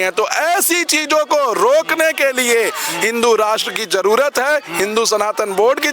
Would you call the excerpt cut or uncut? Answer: uncut